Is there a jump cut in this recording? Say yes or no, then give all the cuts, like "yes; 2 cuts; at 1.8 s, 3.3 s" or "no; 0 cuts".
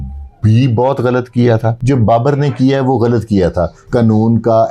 yes; 2 cuts; at 1.7 s, 3.8 s